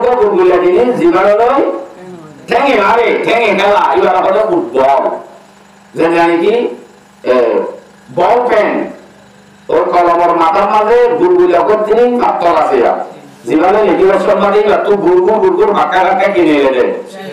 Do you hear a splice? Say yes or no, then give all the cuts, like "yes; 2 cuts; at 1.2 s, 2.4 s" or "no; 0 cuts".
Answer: no; 0 cuts